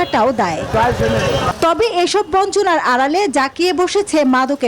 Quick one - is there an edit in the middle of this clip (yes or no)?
yes